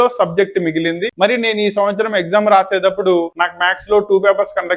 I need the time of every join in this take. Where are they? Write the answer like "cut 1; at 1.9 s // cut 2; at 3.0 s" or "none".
none